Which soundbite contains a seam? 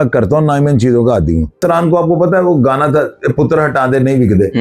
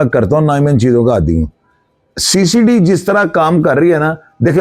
first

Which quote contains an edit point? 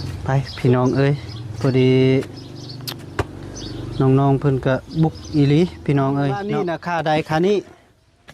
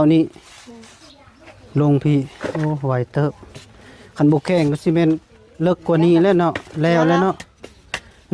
first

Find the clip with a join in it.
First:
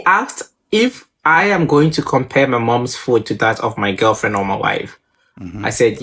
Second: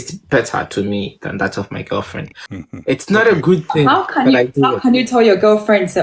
second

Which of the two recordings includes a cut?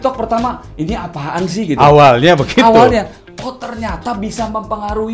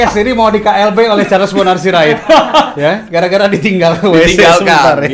first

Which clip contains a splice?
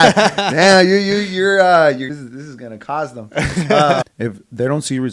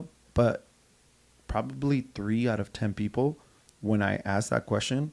first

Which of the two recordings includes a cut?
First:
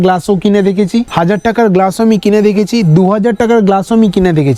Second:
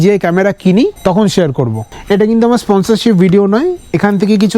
second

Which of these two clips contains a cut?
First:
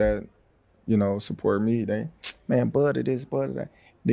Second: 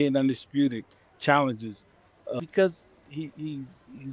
second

